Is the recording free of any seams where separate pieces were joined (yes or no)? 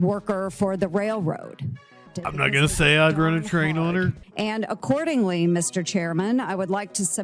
no